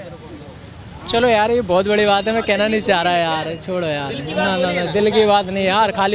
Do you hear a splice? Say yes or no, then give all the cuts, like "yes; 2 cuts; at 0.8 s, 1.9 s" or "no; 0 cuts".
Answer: no; 0 cuts